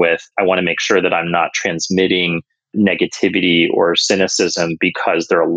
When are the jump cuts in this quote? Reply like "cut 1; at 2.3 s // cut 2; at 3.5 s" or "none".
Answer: none